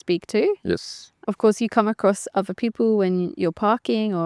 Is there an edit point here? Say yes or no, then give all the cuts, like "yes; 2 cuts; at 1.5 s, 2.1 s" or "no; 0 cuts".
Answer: no; 0 cuts